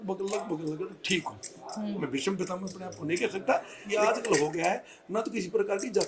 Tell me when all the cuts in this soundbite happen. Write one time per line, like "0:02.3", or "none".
0:03.8